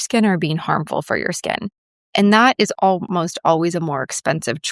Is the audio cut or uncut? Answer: cut